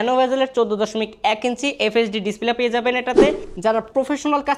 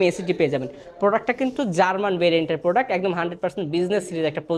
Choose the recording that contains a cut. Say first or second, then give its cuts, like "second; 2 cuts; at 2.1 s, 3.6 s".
first; 1 cut; at 3.5 s